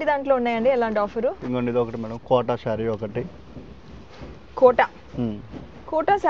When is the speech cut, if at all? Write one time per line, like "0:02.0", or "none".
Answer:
none